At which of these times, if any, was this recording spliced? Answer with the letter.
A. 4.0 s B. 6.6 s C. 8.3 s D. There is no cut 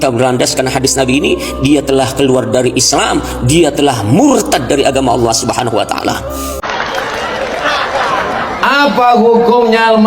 B